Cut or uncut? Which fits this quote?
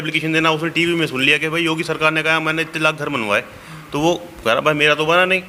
uncut